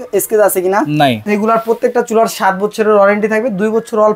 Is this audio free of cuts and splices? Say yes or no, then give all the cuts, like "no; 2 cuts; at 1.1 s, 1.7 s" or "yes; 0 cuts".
no; 1 cut; at 1.2 s